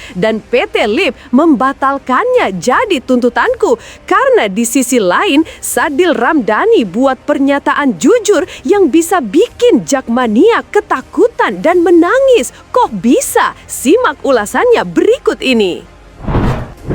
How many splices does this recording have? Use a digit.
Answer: 1